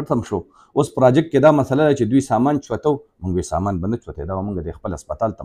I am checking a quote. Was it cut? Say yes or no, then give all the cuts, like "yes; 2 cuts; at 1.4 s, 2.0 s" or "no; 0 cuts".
no; 0 cuts